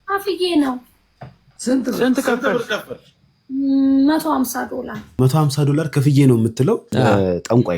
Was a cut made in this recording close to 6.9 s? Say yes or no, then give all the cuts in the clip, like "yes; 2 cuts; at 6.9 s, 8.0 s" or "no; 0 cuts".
yes; 2 cuts; at 5.0 s, 6.9 s